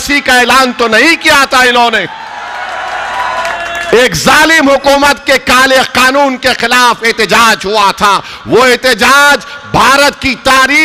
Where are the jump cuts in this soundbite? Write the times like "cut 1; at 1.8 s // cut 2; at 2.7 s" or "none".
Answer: none